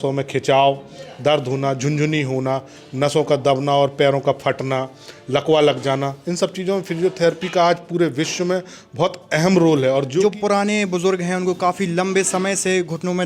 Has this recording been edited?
yes; 1 cut; at 10.2 s

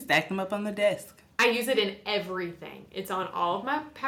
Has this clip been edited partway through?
no; 0 cuts

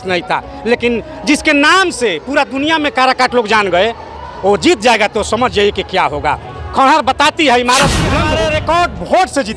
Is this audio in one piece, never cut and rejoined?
no; 1 cut; at 8.2 s

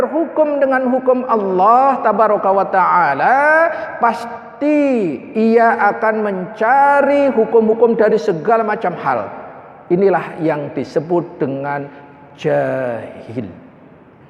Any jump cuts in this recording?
no; 0 cuts

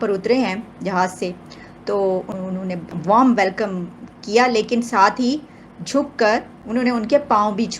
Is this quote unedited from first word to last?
no; 2 cuts; at 2.3 s, 6.6 s

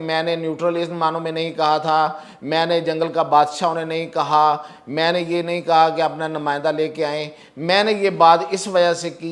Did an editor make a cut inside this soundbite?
no; 0 cuts

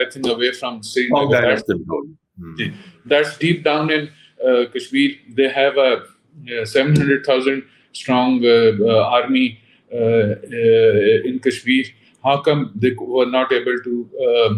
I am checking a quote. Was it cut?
no; 0 cuts

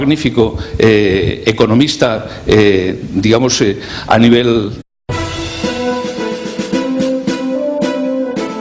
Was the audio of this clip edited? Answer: no; 0 cuts

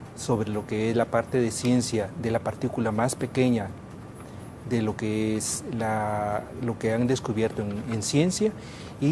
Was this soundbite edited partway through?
yes; 1 cut; at 5.6 s

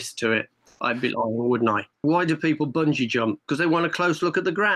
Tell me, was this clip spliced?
yes; 1 cut; at 2.0 s

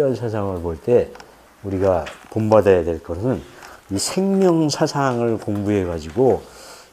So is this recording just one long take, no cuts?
yes; 0 cuts

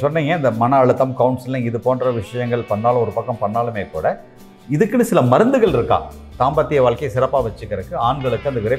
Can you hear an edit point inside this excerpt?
no; 0 cuts

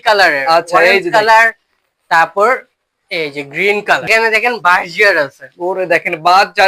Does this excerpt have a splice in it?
yes; 1 cut; at 4.1 s

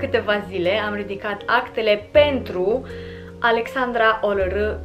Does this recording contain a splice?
no; 0 cuts

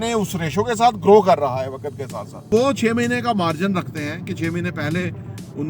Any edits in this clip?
yes; 1 cut; at 2.5 s

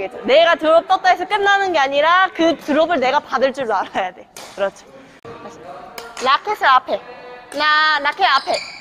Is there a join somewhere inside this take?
yes; 1 cut; at 5.2 s

